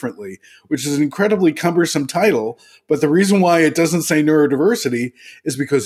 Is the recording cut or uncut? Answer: uncut